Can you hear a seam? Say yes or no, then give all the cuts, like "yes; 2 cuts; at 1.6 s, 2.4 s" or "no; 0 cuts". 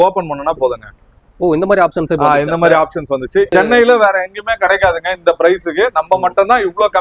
yes; 1 cut; at 3.5 s